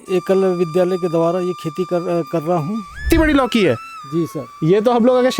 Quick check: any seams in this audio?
yes; 1 cut; at 3.0 s

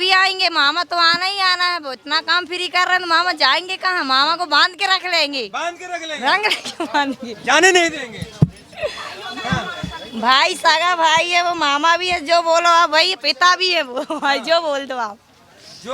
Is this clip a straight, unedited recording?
yes; 0 cuts

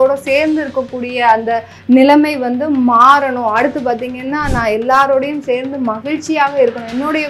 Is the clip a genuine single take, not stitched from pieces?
yes; 0 cuts

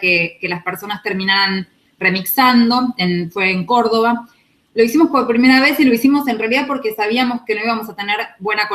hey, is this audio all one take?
no; 1 cut; at 1.6 s

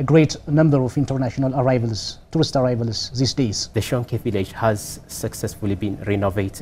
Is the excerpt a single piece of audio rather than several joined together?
no; 1 cut; at 3.6 s

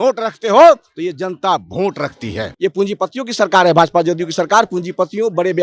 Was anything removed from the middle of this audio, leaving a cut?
yes; 1 cut; at 2.5 s

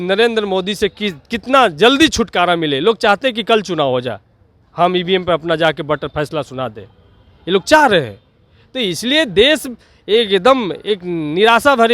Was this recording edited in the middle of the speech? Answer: no; 0 cuts

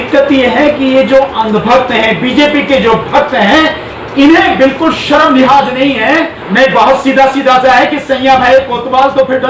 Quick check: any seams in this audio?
yes; 1 cut; at 6.4 s

